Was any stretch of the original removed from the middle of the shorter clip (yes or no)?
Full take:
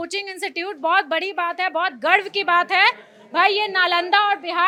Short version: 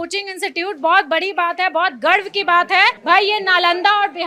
yes